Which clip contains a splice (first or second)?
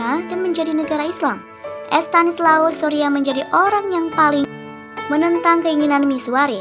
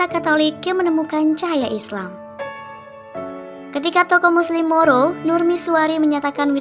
second